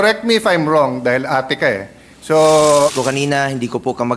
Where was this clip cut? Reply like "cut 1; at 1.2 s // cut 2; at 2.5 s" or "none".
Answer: cut 1; at 3.0 s